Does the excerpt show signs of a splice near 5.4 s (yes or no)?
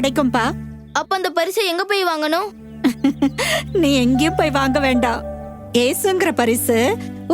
no